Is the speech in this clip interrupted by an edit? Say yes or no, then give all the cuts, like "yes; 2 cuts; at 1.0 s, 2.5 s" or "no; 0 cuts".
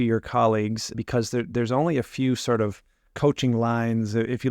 yes; 1 cut; at 1.0 s